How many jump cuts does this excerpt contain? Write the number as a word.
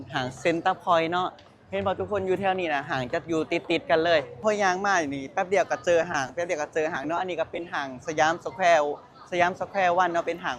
one